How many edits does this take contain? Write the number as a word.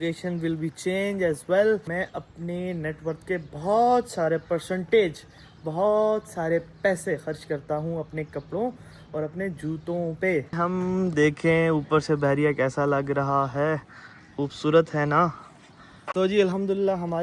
three